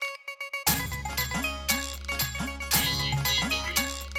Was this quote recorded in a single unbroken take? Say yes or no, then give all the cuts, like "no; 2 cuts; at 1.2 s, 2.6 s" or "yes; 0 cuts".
yes; 0 cuts